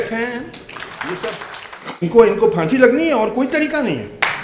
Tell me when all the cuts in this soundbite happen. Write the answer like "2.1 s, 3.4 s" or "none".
2.0 s

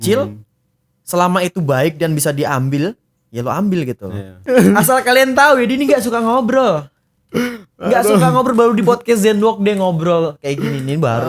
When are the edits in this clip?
4.4 s

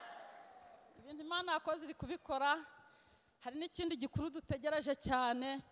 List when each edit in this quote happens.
none

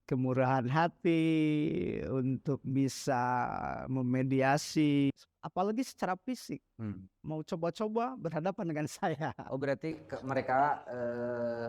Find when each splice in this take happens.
5.1 s

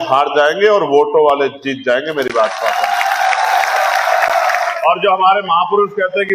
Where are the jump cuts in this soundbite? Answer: none

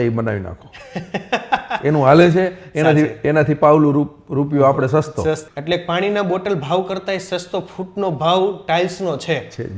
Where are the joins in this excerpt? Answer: 5.5 s

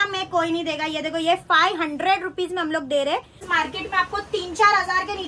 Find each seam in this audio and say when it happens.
3.4 s

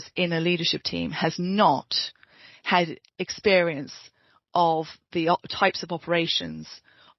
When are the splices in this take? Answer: none

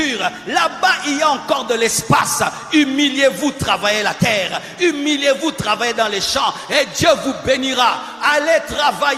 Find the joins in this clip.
none

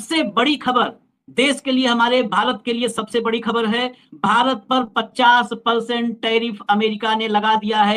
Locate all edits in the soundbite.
none

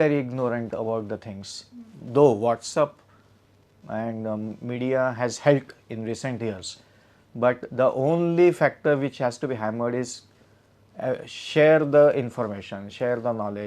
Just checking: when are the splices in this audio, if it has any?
none

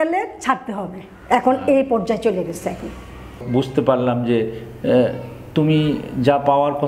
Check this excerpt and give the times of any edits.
3.4 s

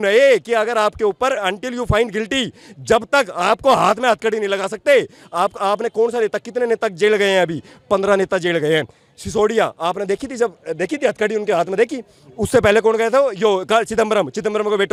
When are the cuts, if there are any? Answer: none

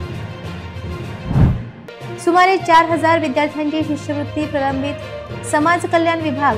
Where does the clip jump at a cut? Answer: 1.0 s

